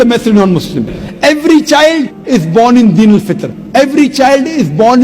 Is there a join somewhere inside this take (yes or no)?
yes